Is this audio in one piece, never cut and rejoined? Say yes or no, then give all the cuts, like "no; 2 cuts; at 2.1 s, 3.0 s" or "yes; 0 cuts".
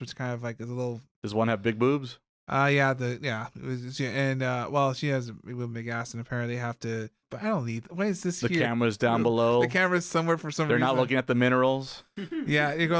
no; 2 cuts; at 1.1 s, 7.3 s